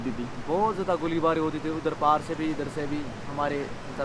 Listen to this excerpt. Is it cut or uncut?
uncut